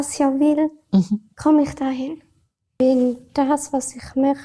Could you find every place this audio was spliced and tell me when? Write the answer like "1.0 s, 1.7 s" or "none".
2.8 s